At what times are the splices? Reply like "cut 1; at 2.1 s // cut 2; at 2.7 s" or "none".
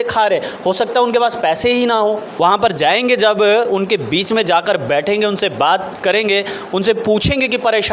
cut 1; at 2.3 s